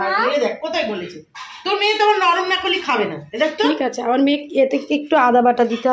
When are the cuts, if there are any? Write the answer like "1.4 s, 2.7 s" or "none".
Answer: none